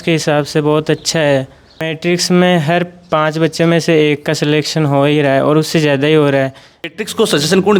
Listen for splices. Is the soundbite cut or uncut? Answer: cut